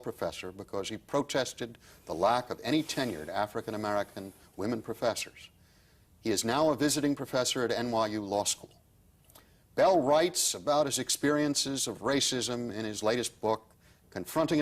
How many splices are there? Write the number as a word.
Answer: one